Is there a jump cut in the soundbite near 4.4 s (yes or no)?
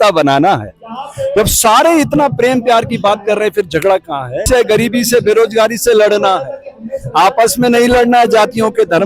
yes